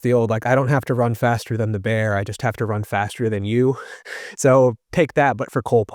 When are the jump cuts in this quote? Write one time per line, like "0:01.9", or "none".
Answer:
none